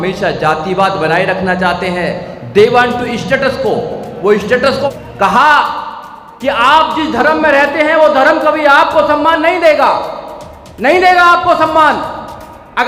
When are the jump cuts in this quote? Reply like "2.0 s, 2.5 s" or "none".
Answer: 4.8 s